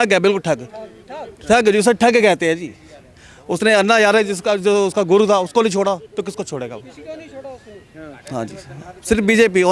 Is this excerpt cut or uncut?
uncut